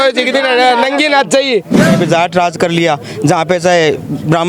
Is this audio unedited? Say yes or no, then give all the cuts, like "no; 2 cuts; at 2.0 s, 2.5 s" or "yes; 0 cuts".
no; 1 cut; at 1.9 s